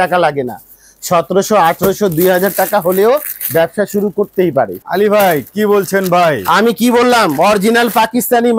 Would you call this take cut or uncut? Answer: cut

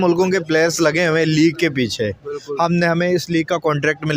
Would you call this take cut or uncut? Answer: uncut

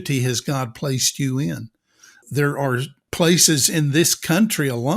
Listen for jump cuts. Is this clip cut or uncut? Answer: cut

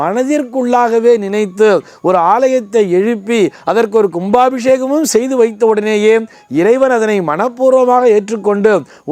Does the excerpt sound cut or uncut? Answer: uncut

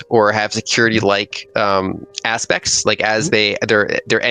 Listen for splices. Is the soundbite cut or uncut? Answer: cut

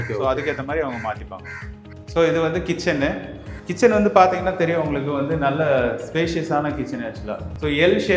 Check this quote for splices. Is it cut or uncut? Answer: uncut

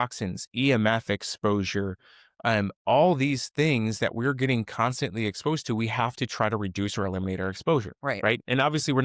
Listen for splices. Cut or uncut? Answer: uncut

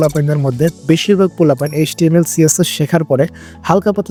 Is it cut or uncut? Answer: uncut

